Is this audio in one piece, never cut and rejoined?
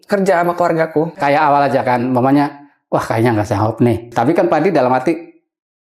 no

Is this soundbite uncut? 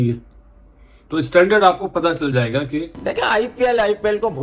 no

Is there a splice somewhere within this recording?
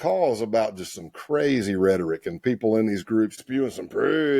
yes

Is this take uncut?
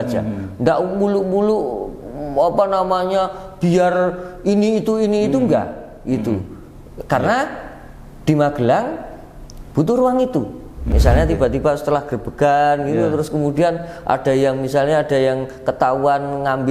no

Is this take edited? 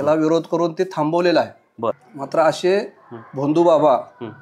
yes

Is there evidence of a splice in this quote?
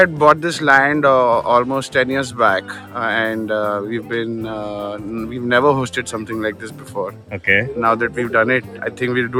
no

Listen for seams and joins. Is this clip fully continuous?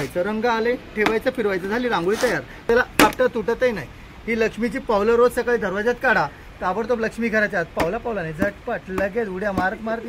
no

